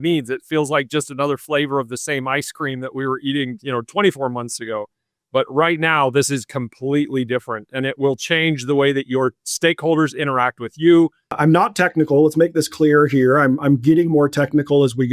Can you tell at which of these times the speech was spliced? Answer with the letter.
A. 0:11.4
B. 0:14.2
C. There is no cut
A